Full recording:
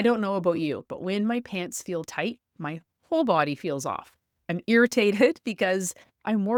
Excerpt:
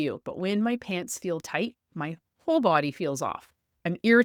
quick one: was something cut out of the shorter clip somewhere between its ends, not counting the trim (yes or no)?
no